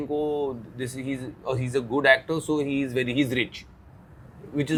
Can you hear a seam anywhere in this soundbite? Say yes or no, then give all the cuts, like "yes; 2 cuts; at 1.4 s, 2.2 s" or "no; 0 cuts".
no; 0 cuts